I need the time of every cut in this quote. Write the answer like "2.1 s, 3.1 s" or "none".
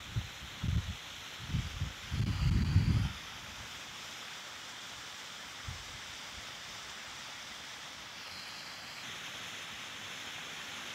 9.0 s